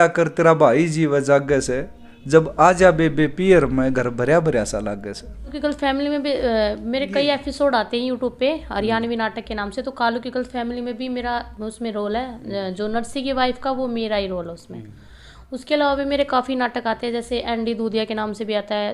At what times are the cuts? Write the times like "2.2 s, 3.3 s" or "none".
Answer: 5.5 s